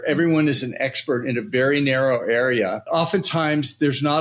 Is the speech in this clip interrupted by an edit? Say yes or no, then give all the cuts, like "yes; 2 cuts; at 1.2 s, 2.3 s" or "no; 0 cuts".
yes; 1 cut; at 2.8 s